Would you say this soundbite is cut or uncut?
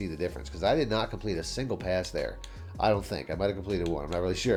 uncut